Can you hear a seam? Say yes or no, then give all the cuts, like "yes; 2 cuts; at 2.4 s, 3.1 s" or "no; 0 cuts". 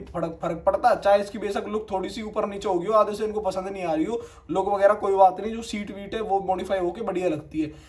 no; 0 cuts